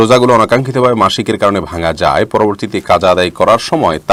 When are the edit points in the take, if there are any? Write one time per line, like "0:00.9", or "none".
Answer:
none